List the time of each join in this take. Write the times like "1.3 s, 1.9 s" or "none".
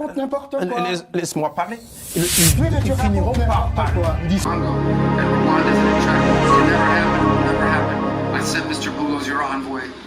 4.4 s